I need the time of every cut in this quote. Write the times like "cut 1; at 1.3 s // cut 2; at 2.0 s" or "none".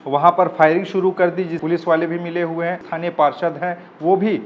cut 1; at 1.6 s // cut 2; at 2.9 s